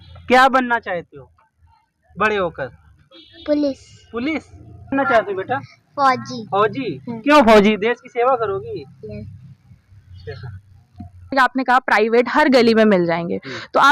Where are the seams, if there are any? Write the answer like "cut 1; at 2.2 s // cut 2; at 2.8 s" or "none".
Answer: cut 1; at 4.9 s // cut 2; at 11.3 s